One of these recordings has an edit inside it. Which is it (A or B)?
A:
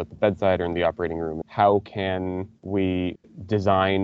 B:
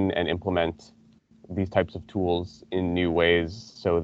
A